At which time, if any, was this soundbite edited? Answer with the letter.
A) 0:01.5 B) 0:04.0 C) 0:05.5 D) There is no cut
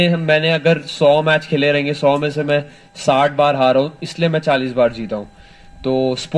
D